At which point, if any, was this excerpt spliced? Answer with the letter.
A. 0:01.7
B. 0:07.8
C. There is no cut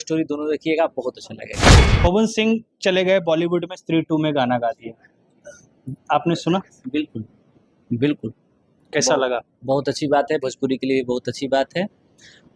A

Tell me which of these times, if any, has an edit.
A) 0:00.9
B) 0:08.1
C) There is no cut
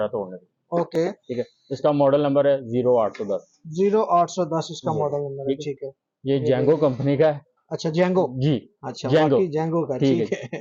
C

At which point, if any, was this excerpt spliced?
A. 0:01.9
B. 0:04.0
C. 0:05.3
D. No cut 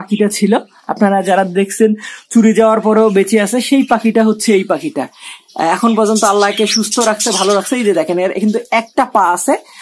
D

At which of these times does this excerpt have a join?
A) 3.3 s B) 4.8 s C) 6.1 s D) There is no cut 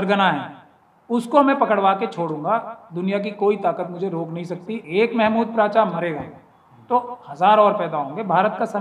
B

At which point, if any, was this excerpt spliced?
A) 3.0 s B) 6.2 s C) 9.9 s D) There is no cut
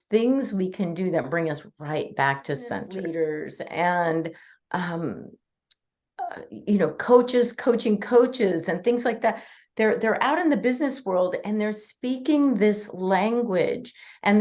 A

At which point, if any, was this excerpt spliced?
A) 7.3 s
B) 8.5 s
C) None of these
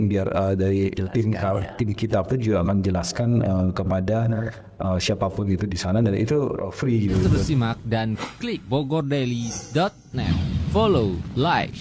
A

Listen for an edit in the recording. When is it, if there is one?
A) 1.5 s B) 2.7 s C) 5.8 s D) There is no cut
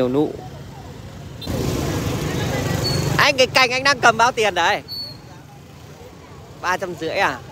A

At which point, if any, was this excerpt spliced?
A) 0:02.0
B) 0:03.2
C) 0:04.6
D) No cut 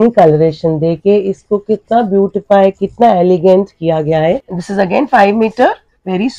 C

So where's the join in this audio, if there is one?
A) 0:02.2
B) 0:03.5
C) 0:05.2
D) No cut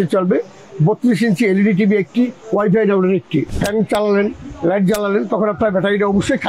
B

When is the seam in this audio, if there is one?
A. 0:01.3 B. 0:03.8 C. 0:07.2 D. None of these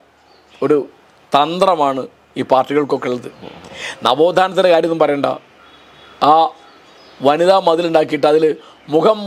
D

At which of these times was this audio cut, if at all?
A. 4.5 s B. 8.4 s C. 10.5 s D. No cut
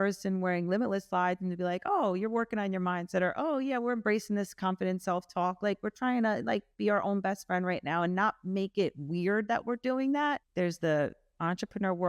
C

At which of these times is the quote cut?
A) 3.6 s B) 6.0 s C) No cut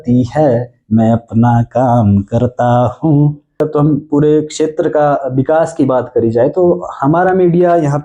A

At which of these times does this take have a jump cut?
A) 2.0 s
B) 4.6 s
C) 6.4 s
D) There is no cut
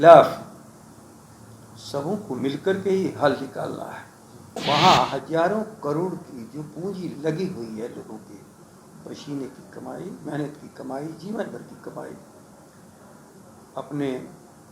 B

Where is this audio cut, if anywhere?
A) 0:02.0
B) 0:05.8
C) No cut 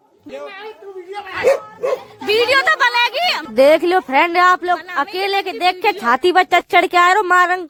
C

